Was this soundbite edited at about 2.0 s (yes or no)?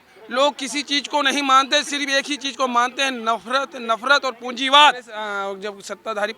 no